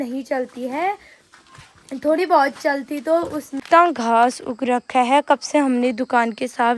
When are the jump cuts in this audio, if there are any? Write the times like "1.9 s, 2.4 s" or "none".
3.6 s

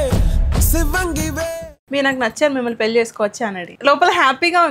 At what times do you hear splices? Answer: 1.7 s, 3.7 s

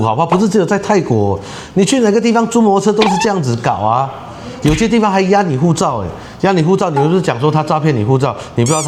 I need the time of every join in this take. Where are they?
none

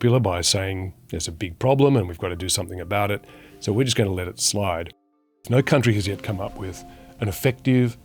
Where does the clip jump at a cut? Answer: none

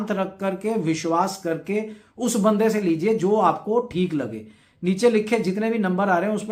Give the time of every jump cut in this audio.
none

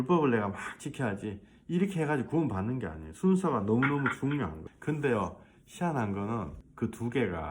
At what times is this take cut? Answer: 4.7 s, 6.6 s

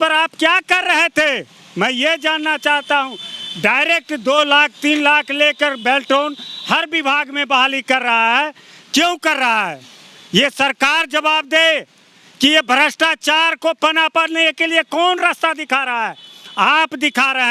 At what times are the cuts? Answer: none

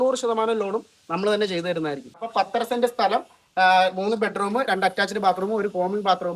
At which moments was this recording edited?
2.2 s

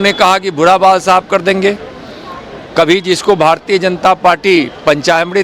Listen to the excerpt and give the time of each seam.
none

